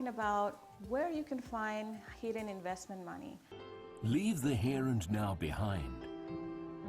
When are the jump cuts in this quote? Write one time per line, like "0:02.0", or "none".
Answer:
0:03.5